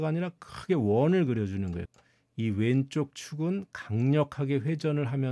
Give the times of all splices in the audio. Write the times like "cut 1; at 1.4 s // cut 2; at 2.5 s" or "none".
cut 1; at 1.8 s